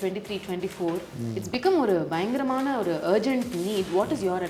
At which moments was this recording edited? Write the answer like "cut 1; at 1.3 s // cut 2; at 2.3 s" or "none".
none